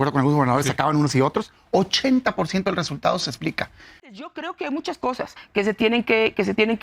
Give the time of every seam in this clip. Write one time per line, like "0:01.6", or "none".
0:04.3